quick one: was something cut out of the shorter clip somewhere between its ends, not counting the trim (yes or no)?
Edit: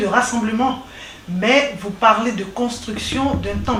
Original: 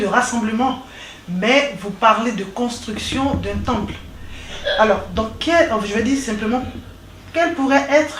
no